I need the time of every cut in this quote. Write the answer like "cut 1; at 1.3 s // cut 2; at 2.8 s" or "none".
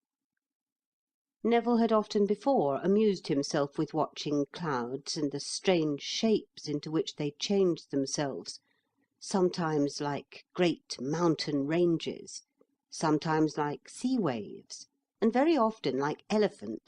cut 1; at 4.7 s